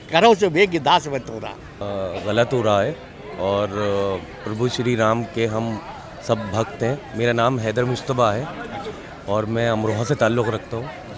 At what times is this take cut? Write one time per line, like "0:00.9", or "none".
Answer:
none